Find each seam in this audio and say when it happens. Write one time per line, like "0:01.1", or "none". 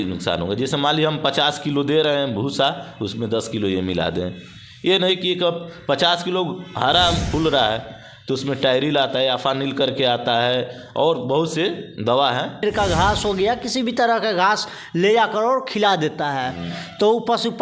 0:07.2
0:12.6